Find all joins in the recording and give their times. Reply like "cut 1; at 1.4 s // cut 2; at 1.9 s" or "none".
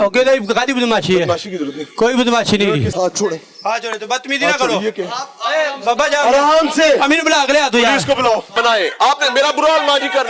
cut 1; at 2.9 s // cut 2; at 8.5 s